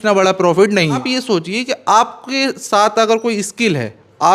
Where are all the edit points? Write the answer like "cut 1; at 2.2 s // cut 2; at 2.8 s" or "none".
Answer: cut 1; at 1.1 s